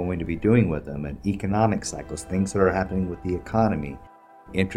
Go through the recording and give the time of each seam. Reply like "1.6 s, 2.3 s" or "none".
none